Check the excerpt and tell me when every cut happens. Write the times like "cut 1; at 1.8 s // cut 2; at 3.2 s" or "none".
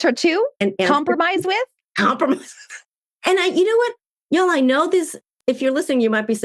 none